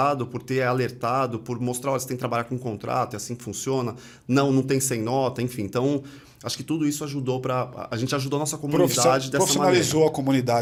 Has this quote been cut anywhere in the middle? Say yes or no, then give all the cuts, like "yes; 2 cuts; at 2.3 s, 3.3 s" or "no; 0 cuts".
no; 0 cuts